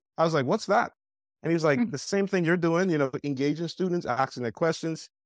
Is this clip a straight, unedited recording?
yes; 0 cuts

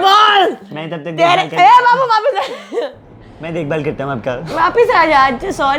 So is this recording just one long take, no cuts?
yes; 0 cuts

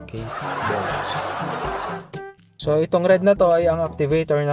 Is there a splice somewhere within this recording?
yes; 1 cut; at 1.9 s

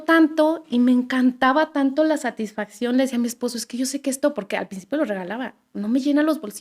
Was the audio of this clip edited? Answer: no; 0 cuts

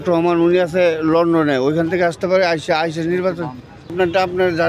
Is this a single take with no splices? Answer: no; 1 cut; at 3.8 s

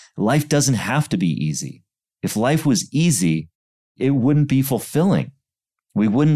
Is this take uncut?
no; 1 cut; at 3.9 s

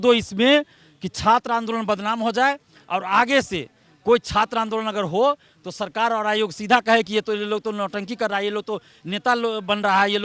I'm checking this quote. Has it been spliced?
no; 0 cuts

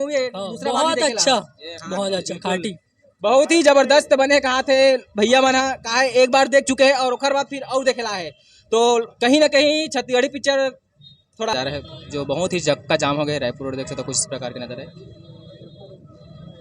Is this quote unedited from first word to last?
no; 1 cut; at 11.5 s

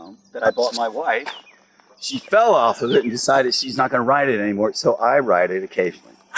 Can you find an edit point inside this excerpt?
no; 0 cuts

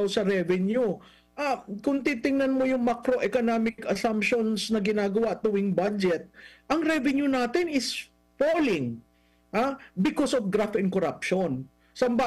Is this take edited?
no; 0 cuts

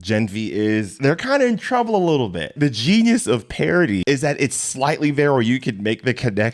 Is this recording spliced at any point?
yes; 3 cuts; at 0.9 s, 2.5 s, 4.0 s

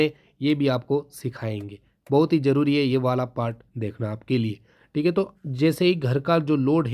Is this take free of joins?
yes; 0 cuts

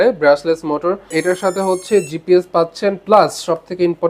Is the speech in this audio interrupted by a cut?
yes; 1 cut; at 1.1 s

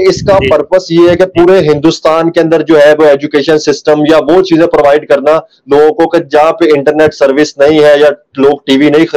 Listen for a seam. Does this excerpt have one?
no; 0 cuts

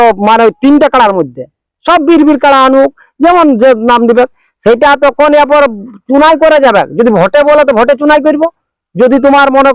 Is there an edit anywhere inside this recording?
no; 0 cuts

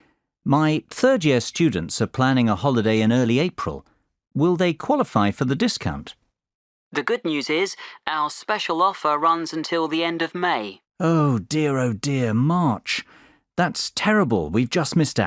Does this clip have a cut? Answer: yes; 1 cut; at 2.5 s

